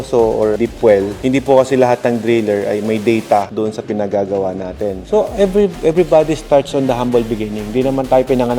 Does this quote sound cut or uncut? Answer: cut